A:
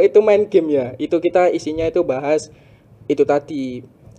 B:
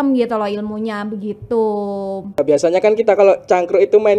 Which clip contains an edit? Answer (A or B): B